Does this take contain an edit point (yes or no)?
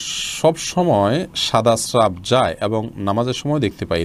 no